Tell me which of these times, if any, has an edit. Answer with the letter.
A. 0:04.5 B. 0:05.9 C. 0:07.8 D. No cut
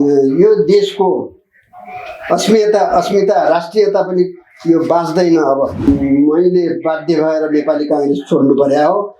B